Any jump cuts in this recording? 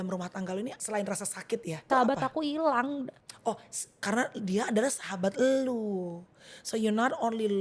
yes; 3 cuts; at 0.8 s, 1.9 s, 3.2 s

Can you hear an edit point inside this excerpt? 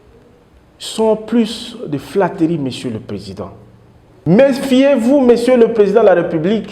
yes; 1 cut; at 4.1 s

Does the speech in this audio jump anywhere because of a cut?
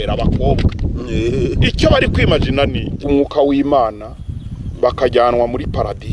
yes; 1 cut; at 3.0 s

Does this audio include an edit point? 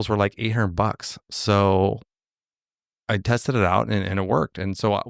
no; 0 cuts

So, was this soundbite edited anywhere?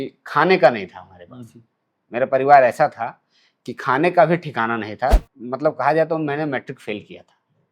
yes; 1 cut; at 5.2 s

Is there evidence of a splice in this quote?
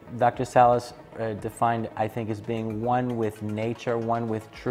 no; 0 cuts

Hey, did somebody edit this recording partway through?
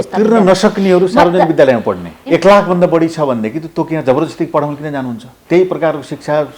yes; 1 cut; at 2.2 s

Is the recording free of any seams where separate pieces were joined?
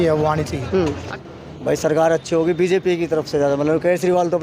no; 1 cut; at 1.0 s

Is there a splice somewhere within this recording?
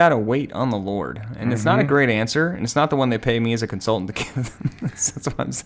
no; 0 cuts

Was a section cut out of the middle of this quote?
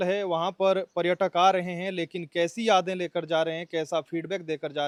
no; 0 cuts

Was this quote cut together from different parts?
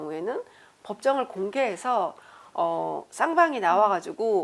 no; 0 cuts

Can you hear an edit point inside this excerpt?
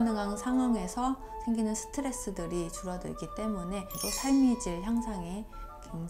no; 0 cuts

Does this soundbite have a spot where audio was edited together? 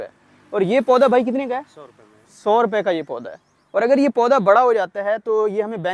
no; 0 cuts

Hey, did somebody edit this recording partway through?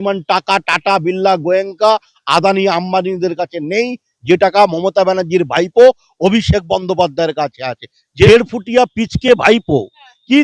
yes; 1 cut; at 8.3 s

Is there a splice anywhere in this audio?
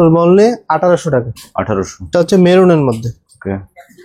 no; 0 cuts

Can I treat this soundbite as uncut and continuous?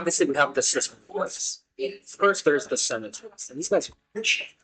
yes; 0 cuts

